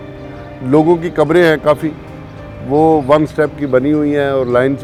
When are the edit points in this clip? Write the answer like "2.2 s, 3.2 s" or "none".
none